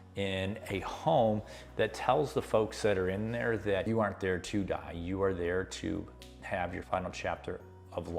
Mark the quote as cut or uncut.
cut